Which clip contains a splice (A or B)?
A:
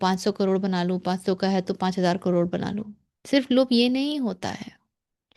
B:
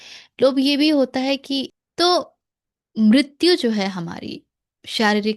B